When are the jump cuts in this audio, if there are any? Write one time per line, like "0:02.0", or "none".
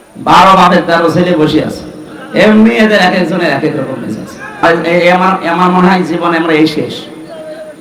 0:04.6